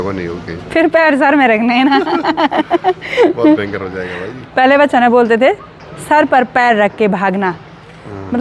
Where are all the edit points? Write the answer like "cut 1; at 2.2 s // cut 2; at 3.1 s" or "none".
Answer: none